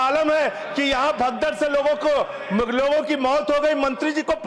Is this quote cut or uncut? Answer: uncut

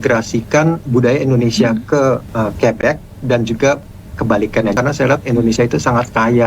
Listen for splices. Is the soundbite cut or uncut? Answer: cut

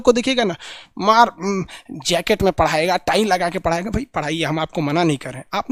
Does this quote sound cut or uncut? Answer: uncut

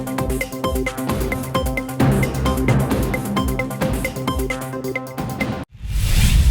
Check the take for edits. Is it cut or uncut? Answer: cut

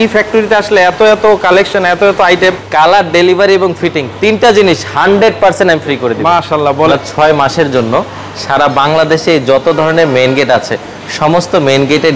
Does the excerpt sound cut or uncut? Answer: cut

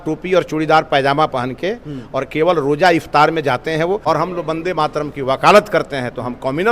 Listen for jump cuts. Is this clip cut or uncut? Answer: cut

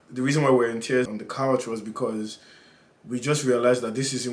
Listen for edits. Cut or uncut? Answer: cut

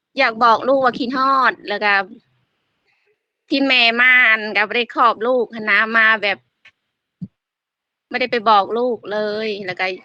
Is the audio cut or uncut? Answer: uncut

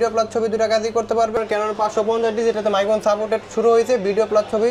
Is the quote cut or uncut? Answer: cut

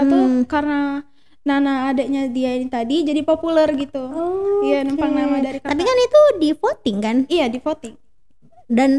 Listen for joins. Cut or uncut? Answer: uncut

